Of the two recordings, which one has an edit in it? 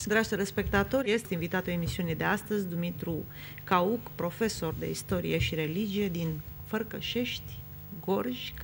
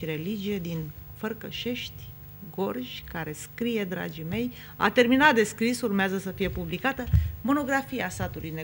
first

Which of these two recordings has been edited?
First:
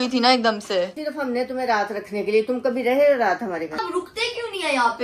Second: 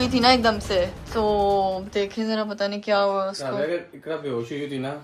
first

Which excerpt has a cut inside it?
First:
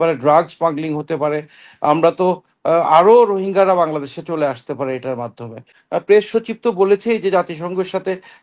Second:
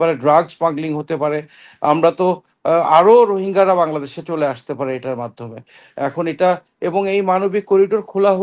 first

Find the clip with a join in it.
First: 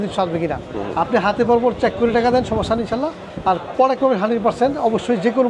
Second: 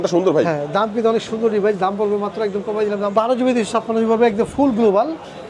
second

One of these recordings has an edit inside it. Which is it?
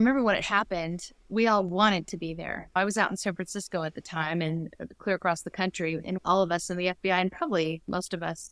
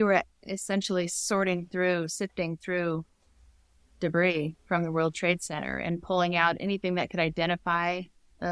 first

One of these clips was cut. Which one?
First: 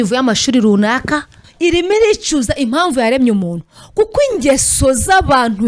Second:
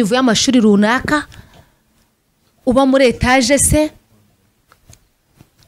first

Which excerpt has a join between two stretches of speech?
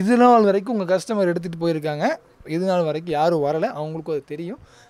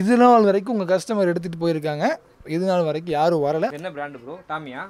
second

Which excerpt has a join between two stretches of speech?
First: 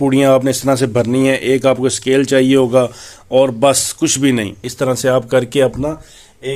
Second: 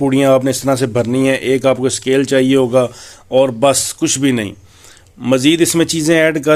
first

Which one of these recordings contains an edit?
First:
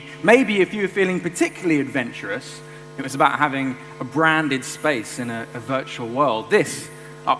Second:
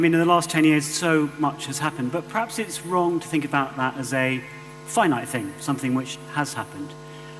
first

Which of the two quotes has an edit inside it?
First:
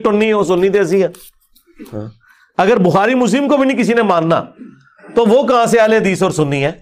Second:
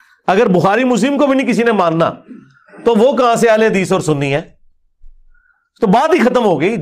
first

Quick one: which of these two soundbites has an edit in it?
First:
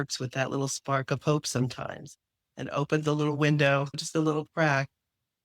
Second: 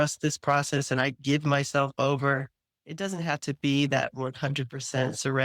first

